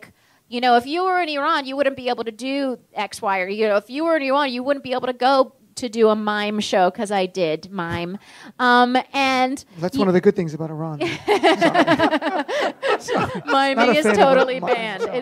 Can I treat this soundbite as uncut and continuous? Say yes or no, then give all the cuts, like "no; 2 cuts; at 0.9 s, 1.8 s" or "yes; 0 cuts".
no; 1 cut; at 5.6 s